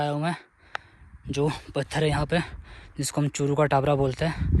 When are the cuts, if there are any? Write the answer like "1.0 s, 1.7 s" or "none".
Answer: none